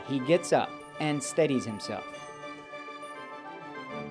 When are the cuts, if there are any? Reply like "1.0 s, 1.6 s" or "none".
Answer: none